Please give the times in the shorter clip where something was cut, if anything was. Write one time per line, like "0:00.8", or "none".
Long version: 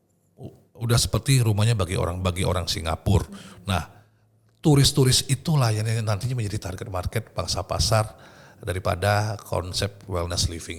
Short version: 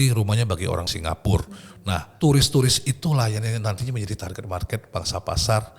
0:00.9
0:02.1